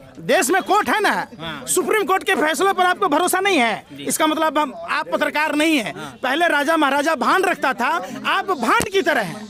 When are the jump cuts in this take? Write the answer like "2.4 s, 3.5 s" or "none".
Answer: none